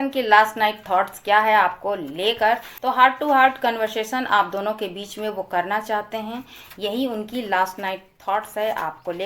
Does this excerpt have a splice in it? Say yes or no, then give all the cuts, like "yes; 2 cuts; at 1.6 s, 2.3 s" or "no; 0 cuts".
yes; 1 cut; at 2.7 s